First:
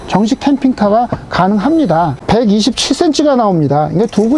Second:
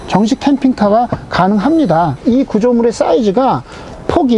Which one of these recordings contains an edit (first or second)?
first